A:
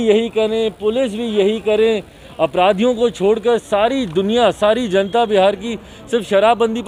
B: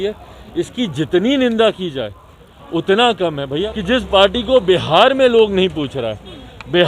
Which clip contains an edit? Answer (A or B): B